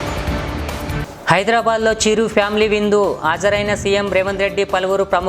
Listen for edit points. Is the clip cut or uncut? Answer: cut